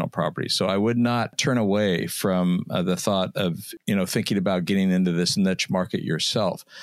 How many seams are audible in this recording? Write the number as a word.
two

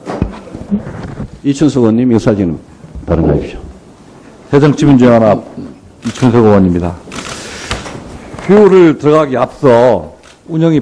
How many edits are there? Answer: one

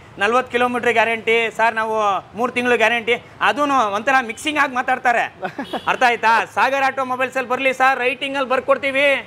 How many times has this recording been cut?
zero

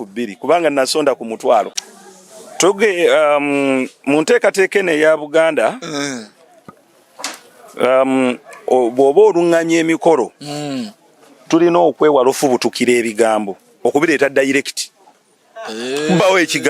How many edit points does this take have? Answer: one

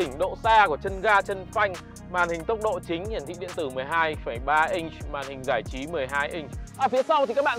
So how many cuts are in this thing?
one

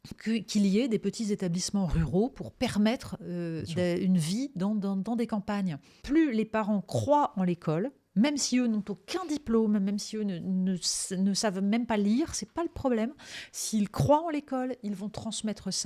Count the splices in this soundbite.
one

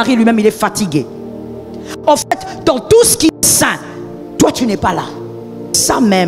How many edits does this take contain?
zero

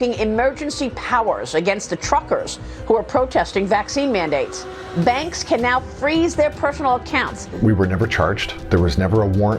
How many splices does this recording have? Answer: two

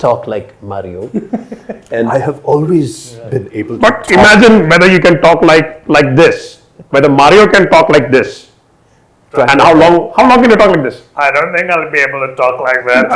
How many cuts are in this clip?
zero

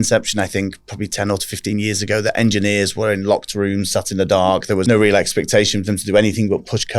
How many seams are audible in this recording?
one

